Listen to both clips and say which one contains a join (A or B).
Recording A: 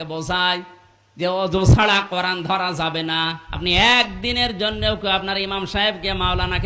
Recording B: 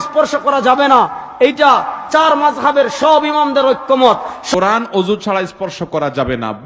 B